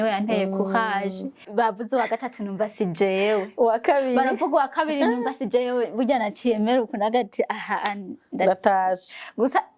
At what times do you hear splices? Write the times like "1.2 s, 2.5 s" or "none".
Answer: 1.4 s